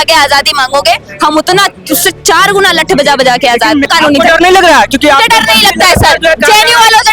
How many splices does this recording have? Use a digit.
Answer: 1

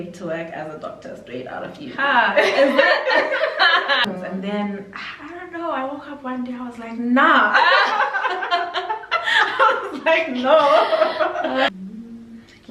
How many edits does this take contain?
2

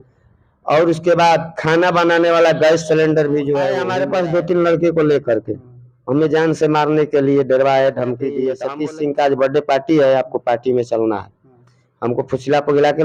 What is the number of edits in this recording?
2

